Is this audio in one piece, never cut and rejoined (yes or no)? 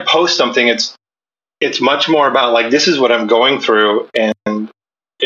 yes